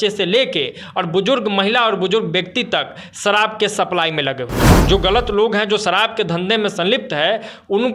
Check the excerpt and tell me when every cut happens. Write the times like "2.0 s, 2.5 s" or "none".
4.7 s